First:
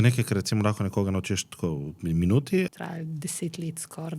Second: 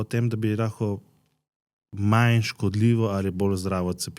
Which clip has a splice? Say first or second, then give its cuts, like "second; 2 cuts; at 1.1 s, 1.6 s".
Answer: first; 1 cut; at 2.7 s